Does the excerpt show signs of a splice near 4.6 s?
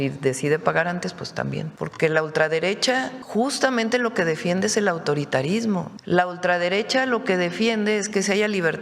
no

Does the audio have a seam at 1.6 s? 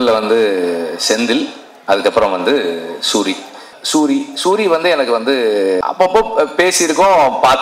no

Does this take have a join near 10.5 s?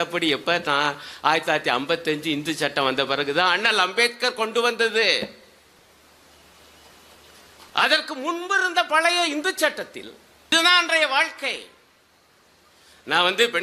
yes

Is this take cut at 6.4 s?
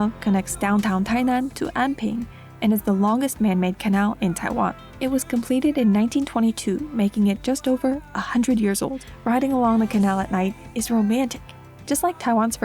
no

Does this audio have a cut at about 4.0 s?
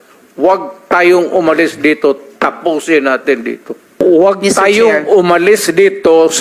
yes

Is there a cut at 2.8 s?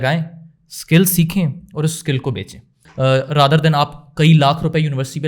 yes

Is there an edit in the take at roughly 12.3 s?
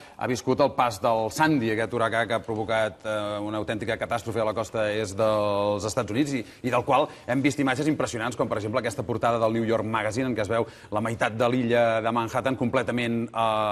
no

